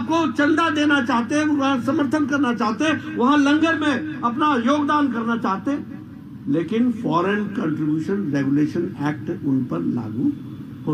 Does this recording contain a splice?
no; 0 cuts

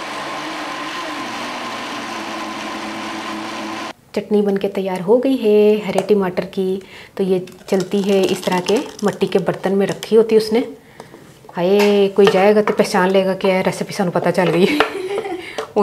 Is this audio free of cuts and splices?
yes; 0 cuts

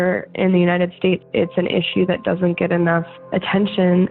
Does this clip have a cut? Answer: yes; 2 cuts; at 1.2 s, 3.2 s

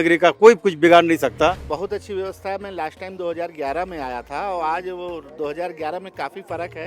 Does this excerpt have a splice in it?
yes; 1 cut; at 1.7 s

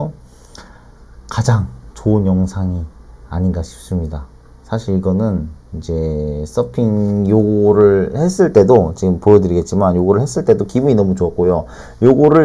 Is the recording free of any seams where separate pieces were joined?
yes; 0 cuts

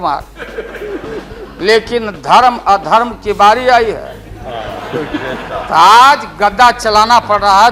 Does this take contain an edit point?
no; 0 cuts

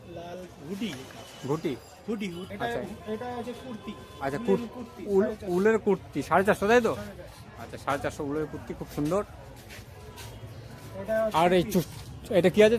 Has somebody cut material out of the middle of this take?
yes; 1 cut; at 2.4 s

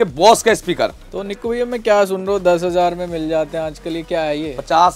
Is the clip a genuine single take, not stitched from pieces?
yes; 0 cuts

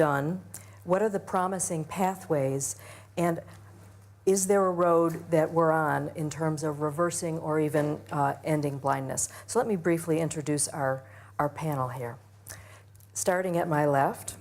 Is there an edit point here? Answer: yes; 1 cut; at 10.6 s

